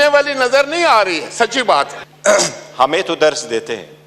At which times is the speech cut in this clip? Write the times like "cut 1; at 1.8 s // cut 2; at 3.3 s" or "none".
cut 1; at 2.0 s